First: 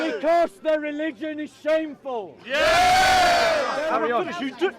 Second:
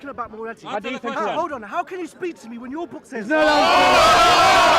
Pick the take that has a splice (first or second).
first